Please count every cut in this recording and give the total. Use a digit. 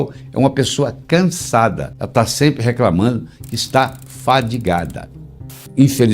2